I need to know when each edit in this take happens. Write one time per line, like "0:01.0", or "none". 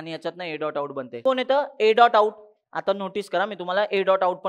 0:01.1